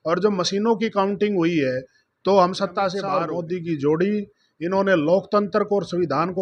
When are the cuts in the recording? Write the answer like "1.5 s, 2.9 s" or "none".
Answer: 3.2 s